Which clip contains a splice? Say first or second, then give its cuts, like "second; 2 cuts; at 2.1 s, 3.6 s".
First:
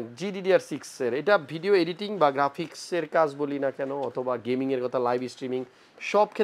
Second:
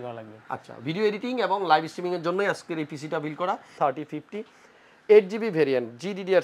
second; 1 cut; at 3.7 s